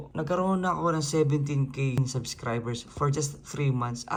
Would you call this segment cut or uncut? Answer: uncut